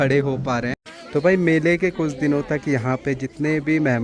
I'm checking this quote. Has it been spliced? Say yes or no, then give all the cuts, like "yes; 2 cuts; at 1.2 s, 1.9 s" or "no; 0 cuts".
yes; 1 cut; at 0.9 s